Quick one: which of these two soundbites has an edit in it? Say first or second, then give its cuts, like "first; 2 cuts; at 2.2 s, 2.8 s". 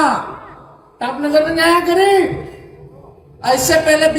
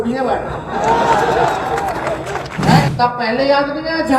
second; 1 cut; at 2.9 s